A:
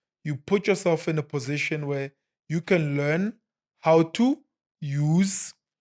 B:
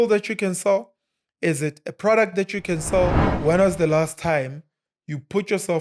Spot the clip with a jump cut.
B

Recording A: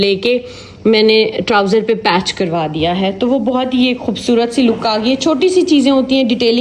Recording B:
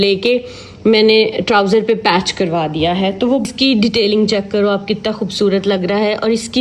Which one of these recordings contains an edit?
B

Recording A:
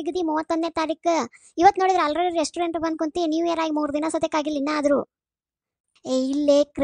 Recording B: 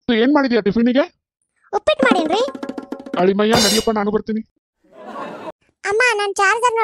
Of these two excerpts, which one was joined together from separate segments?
B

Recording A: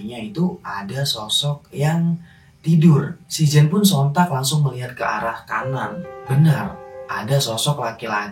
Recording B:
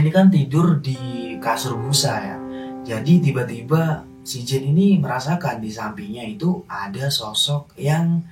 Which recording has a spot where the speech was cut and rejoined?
A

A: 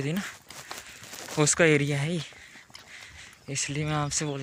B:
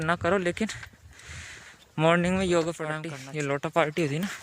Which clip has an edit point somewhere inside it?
B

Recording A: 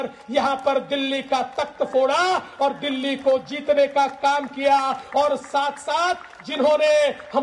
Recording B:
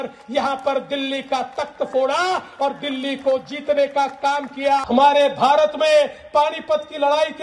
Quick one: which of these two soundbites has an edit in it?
B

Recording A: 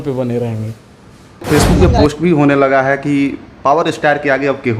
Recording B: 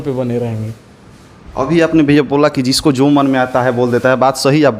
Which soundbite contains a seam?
A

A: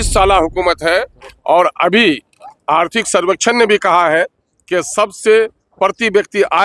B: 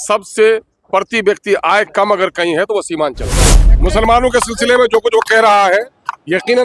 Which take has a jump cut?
B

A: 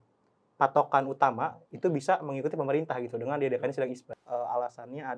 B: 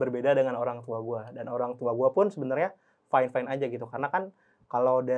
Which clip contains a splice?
A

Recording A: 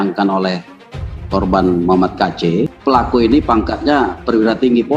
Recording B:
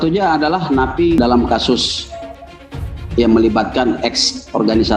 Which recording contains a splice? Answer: A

